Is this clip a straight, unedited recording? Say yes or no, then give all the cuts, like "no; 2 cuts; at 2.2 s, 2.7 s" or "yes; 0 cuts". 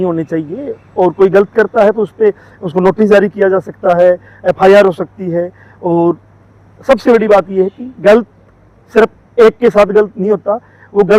yes; 0 cuts